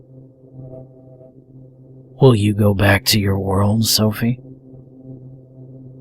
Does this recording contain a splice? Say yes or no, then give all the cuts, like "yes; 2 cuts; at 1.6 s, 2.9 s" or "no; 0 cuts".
yes; 1 cut; at 1.5 s